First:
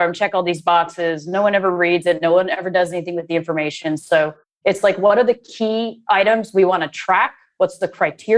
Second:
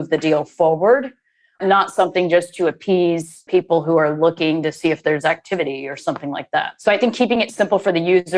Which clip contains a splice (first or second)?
second